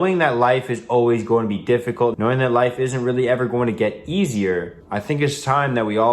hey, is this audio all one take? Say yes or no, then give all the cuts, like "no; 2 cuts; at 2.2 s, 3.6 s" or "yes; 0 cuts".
no; 2 cuts; at 2.1 s, 4.8 s